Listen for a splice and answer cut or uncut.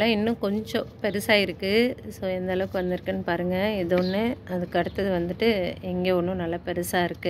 uncut